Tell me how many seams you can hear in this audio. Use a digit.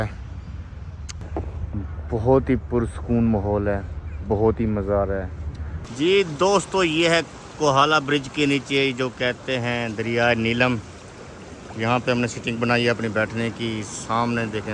2